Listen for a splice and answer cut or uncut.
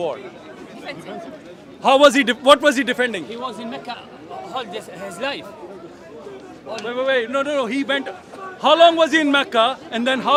uncut